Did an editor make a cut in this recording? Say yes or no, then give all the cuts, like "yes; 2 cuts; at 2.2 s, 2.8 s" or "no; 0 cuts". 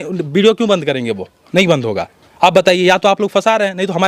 no; 0 cuts